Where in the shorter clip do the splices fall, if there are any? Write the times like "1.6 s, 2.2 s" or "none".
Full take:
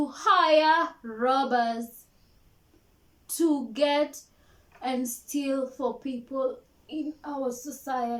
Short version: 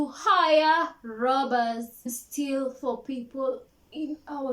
2.2 s